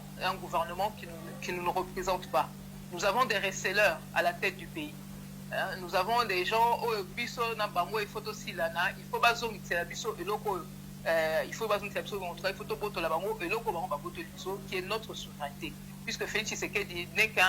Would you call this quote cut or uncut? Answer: uncut